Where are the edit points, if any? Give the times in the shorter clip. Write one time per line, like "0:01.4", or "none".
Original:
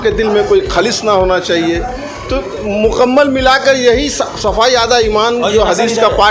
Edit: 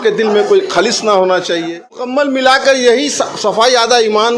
0:02.1